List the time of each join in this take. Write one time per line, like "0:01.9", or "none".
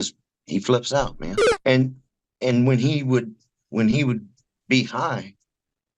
0:01.5